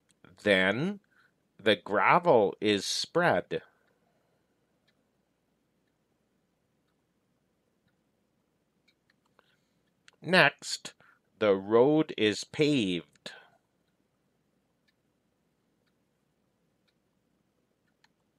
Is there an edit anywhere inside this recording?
no; 0 cuts

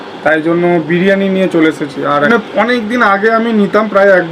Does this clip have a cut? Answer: yes; 1 cut; at 2.3 s

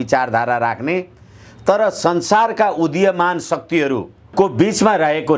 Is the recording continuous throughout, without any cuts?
no; 1 cut; at 4.2 s

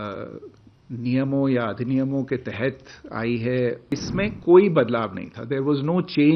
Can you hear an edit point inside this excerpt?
yes; 1 cut; at 3.8 s

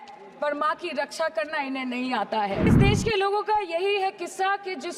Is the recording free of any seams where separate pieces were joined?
no; 1 cut; at 2.7 s

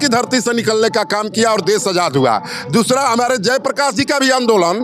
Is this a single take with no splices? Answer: yes; 0 cuts

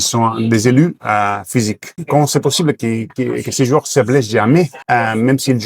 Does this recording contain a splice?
yes; 2 cuts; at 1.9 s, 4.8 s

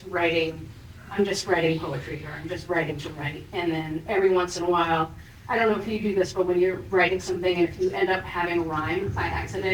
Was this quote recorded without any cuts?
yes; 0 cuts

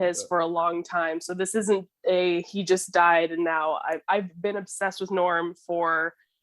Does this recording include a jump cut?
no; 0 cuts

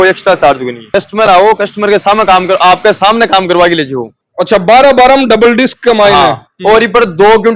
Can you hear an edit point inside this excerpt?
yes; 2 cuts; at 0.8 s, 4.1 s

